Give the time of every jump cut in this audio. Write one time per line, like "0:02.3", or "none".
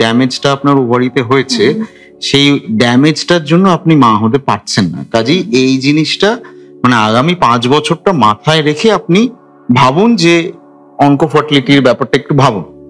none